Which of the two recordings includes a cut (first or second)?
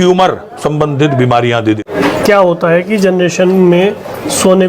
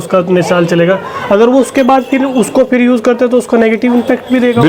first